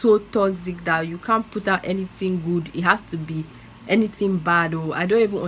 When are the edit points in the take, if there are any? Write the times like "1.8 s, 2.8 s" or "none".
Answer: none